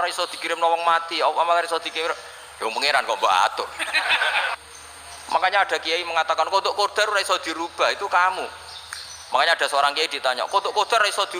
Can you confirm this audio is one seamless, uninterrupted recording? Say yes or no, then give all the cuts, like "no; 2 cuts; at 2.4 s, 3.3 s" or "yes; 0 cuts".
no; 1 cut; at 4.5 s